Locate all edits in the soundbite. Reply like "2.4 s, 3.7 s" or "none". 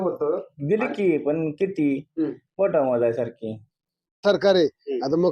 4.2 s